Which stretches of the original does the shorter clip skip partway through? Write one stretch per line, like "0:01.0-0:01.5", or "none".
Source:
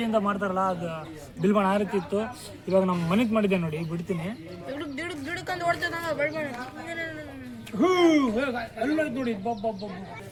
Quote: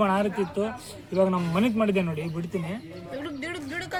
none